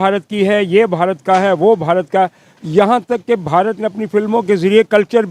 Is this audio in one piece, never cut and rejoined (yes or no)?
yes